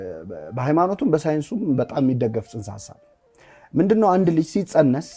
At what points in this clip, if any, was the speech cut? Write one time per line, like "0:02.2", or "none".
none